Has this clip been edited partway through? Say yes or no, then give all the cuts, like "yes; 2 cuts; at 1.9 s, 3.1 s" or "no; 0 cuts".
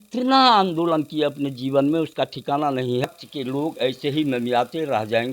yes; 1 cut; at 3.0 s